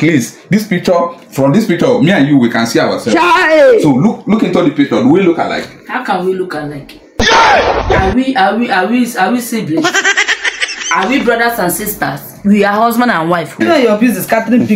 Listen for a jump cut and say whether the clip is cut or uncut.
cut